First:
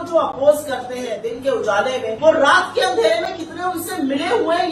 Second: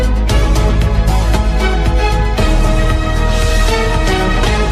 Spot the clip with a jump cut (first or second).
first